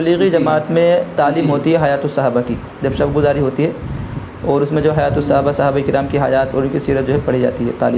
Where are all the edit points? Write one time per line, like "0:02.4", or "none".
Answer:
none